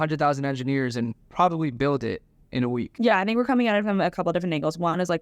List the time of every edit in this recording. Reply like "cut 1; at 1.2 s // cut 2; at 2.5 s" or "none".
none